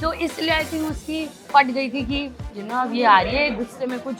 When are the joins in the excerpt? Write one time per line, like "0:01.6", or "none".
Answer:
0:01.4